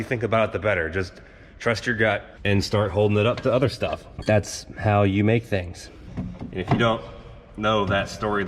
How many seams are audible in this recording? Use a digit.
2